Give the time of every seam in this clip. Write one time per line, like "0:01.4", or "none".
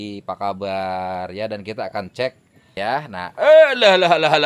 0:02.7